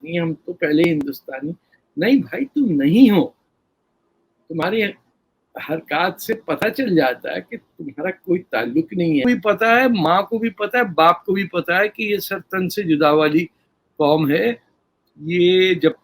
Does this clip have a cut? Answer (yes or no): yes